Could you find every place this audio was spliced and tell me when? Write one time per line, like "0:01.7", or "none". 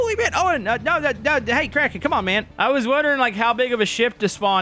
0:02.5